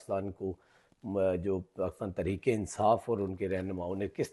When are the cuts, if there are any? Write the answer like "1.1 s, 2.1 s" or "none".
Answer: none